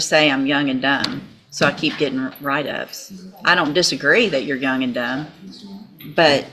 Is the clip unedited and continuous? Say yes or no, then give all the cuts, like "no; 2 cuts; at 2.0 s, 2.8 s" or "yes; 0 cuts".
yes; 0 cuts